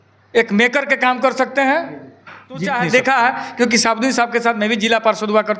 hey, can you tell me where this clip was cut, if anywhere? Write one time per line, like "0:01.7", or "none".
0:02.8